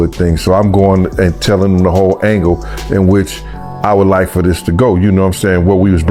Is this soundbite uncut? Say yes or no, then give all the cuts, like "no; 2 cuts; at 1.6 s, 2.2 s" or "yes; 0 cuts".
yes; 0 cuts